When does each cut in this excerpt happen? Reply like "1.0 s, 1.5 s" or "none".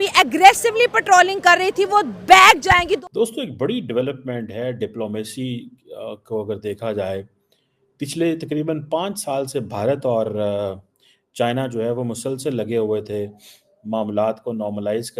3.0 s